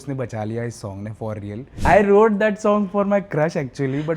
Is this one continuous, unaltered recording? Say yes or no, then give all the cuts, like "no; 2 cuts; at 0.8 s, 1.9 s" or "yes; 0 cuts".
no; 1 cut; at 1.7 s